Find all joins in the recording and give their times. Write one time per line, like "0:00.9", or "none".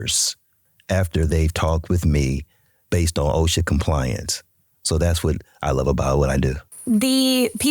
0:06.7